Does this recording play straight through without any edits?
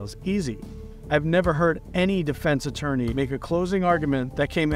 yes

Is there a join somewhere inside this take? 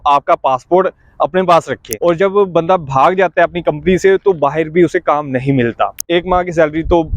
yes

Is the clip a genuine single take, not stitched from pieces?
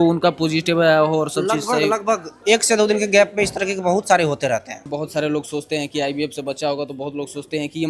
no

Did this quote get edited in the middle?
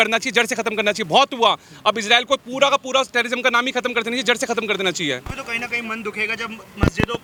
no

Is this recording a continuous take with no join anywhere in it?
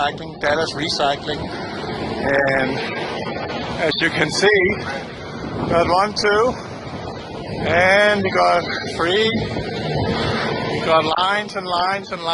yes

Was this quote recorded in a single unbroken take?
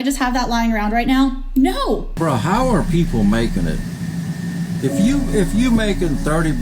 no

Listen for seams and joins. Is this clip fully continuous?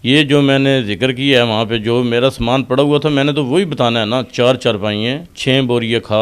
no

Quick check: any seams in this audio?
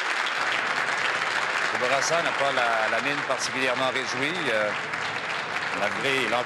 no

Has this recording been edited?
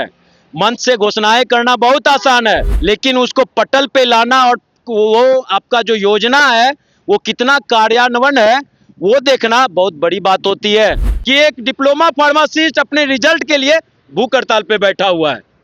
yes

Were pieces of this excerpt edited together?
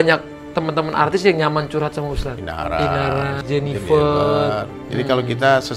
yes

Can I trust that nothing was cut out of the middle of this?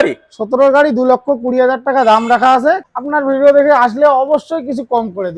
no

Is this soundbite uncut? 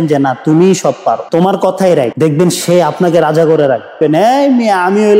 no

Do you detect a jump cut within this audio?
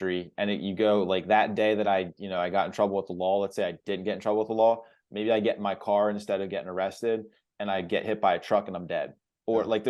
no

